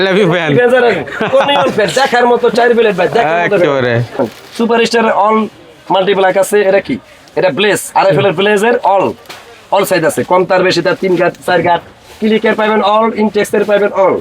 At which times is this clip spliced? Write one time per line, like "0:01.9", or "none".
0:04.2